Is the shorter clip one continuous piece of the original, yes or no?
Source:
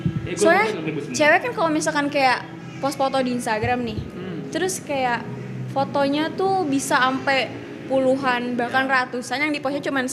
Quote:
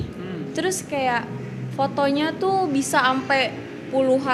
yes